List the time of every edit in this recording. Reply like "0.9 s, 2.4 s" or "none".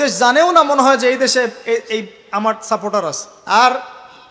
3.3 s